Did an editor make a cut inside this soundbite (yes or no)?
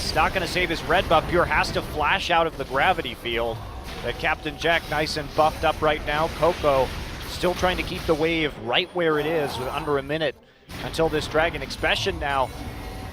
yes